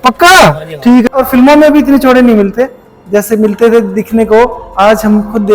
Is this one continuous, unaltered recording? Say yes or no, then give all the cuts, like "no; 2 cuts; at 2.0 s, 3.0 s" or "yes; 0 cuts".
no; 1 cut; at 1.2 s